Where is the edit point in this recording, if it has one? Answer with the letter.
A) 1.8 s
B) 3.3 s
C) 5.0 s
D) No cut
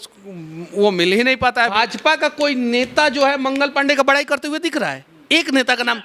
A